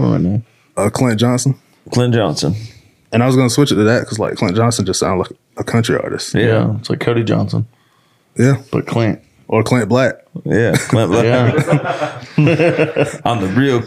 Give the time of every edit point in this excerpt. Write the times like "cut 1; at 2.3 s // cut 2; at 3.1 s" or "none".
none